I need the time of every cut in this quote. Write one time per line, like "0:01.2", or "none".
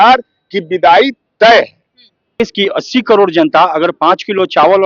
0:02.4